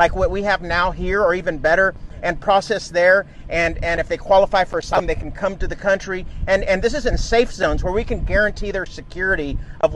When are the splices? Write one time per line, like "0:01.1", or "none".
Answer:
0:05.0